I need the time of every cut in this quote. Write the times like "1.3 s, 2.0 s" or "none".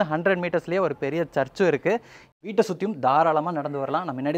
2.2 s